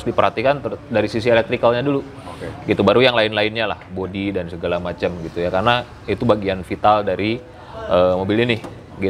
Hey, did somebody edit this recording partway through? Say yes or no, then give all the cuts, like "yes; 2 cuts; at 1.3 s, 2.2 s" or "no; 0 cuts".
no; 0 cuts